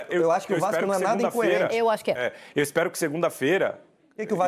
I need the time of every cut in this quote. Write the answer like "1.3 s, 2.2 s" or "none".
none